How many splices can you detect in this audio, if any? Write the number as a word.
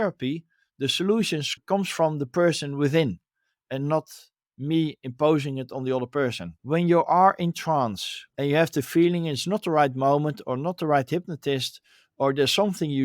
two